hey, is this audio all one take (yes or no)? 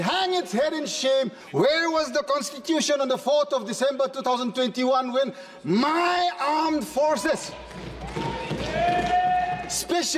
no